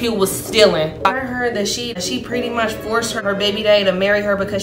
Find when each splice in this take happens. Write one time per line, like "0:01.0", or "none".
0:01.2